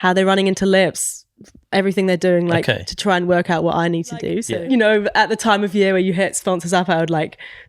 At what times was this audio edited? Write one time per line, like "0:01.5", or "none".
0:04.4